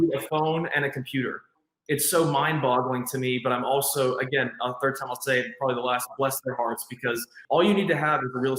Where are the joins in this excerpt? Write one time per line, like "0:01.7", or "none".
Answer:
0:01.5
0:07.4